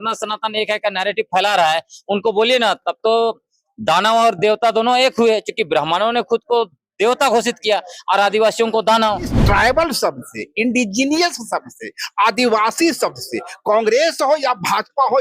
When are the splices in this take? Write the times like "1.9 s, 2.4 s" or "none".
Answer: 9.4 s